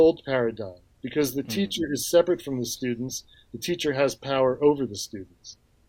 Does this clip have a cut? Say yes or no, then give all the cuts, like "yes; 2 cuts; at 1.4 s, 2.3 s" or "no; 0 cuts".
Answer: no; 0 cuts